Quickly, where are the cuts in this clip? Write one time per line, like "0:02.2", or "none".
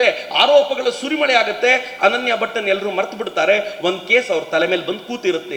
none